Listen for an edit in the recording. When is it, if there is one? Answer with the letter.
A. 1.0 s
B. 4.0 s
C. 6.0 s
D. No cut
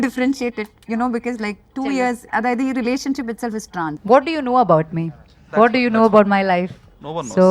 B